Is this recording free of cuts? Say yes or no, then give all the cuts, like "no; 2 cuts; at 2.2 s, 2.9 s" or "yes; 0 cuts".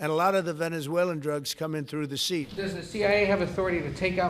no; 1 cut; at 2.5 s